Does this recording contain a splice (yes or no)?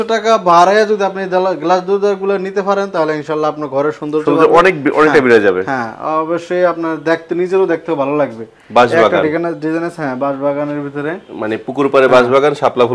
no